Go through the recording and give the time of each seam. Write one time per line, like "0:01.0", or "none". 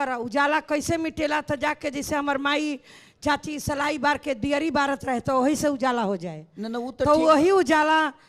none